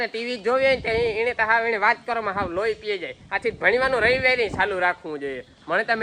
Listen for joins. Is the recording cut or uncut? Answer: uncut